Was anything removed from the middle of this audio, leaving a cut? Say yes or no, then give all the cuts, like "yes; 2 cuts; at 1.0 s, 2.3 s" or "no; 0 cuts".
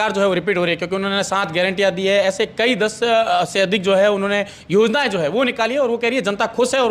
no; 0 cuts